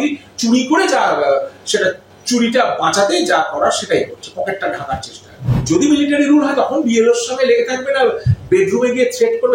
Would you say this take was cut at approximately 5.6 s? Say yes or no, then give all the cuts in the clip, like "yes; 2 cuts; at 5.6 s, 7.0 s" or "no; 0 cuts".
yes; 1 cut; at 5.6 s